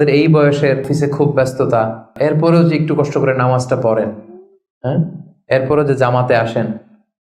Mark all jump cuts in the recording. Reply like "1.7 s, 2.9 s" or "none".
0.9 s, 2.1 s